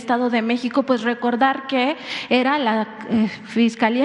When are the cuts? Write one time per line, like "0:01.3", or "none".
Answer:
none

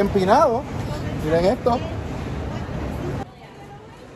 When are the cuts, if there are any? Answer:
0:03.2

